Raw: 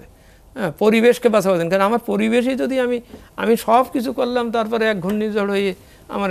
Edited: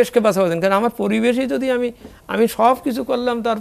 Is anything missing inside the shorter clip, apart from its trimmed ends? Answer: no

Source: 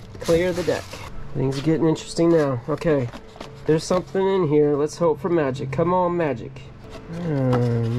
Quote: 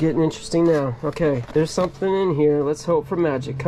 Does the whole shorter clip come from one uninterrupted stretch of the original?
no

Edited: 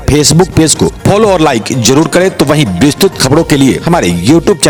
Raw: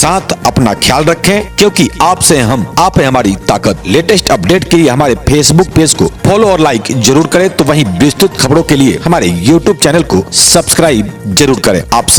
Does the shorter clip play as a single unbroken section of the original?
yes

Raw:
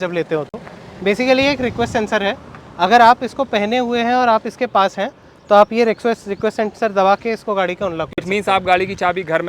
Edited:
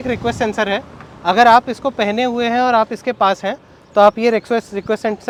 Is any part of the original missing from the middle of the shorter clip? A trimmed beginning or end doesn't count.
no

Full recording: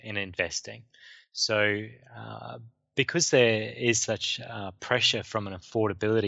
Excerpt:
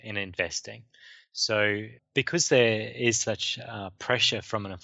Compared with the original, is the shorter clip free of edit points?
no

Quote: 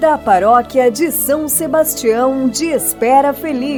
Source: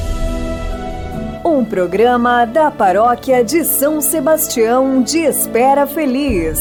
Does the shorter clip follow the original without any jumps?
yes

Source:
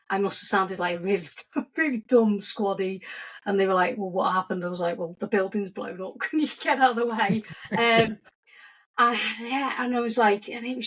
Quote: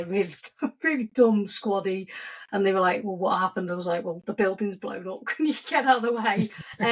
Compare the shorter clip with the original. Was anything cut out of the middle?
no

